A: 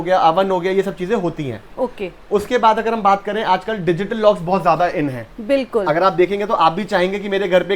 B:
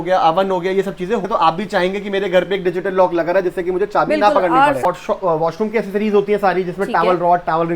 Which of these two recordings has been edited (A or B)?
B